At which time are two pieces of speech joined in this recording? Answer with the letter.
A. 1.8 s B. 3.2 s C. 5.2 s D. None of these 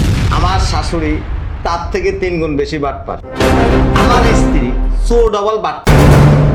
D